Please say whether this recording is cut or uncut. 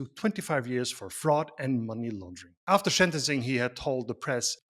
cut